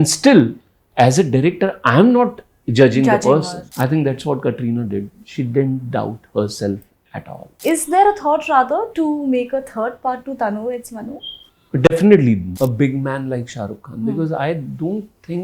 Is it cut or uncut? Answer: cut